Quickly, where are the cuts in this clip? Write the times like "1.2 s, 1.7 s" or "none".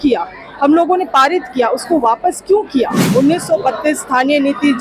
3.0 s